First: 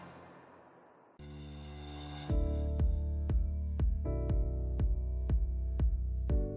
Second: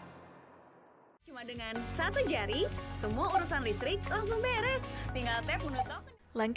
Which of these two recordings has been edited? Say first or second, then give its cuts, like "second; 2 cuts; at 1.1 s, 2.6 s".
second; 1 cut; at 1.0 s